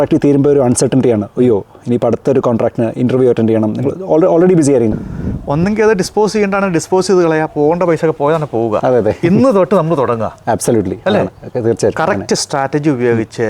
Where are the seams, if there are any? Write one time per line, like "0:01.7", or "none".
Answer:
0:04.9